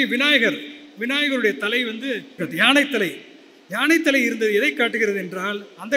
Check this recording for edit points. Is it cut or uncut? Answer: cut